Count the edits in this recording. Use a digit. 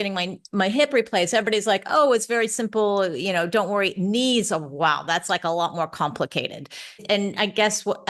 1